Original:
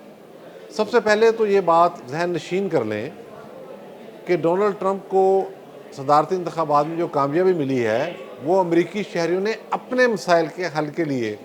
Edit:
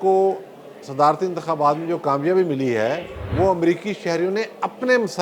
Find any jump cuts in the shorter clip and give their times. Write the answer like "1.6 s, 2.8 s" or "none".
none